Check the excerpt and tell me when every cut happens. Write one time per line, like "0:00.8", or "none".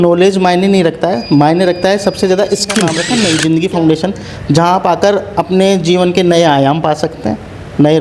0:03.0